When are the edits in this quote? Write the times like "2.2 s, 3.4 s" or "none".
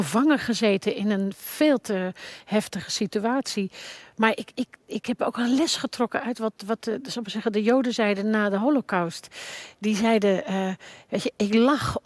none